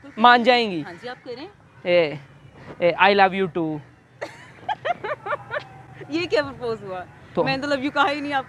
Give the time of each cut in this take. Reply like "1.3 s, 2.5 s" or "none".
none